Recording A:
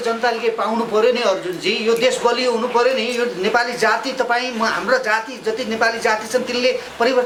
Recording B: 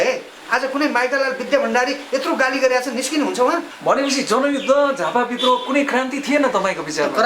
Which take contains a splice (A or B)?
B